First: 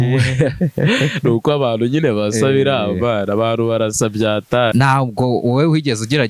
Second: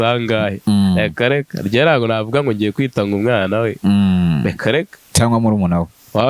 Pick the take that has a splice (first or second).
first